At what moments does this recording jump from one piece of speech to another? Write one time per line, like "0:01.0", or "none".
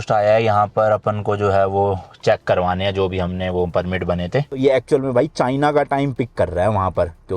0:04.5